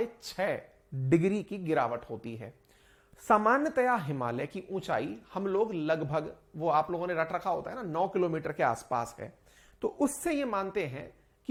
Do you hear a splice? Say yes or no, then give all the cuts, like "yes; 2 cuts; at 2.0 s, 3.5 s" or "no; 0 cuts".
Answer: no; 0 cuts